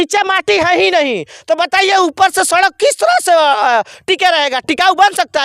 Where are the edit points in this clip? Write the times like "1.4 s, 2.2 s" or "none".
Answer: none

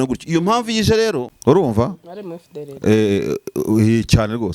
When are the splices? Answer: 1.3 s

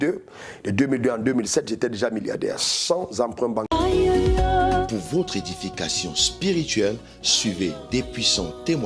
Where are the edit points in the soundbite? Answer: 3.7 s

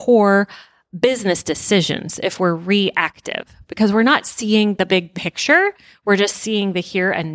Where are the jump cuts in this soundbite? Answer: none

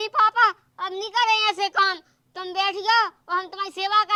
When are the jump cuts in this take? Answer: none

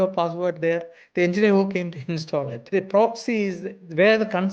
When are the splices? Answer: 2.6 s

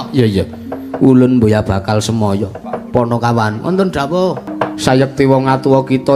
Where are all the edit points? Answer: 2.7 s, 4.5 s

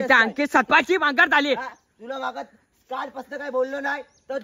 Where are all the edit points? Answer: none

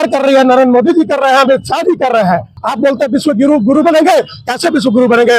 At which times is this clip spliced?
2.6 s

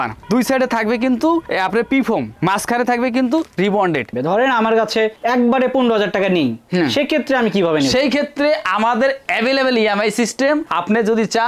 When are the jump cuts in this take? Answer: 4.2 s

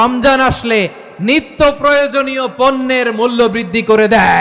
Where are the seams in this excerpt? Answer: none

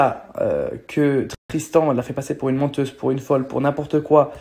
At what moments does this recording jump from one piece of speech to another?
none

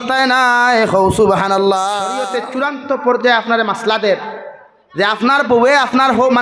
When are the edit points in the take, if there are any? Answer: 2.3 s

